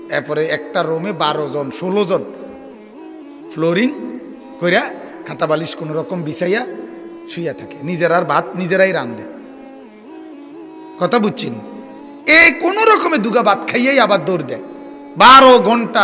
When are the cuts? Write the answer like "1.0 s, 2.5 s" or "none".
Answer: none

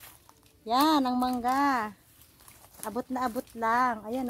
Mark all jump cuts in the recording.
none

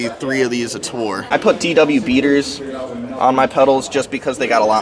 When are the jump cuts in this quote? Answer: 1.3 s

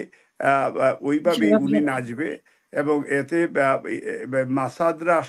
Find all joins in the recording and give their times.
none

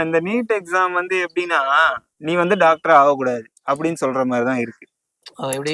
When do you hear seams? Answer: 2.1 s

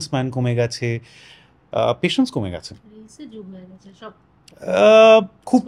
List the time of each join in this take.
none

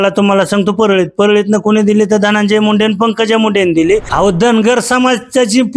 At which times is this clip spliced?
4.1 s

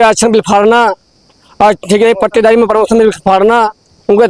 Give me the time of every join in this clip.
none

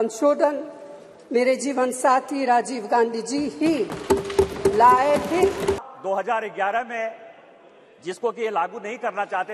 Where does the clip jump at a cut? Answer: 5.8 s

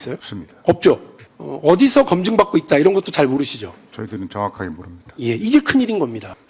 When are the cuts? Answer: none

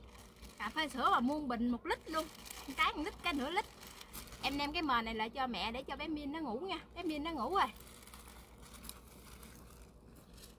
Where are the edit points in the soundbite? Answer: none

